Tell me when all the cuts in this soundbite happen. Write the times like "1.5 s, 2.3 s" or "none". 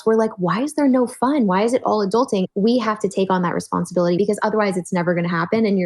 2.5 s, 4.2 s